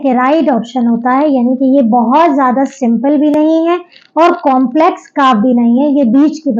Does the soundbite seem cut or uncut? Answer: uncut